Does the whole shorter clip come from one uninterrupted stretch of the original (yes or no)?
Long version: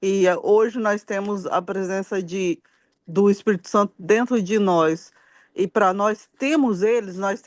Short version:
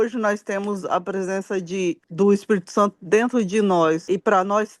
no